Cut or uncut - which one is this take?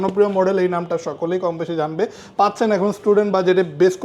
uncut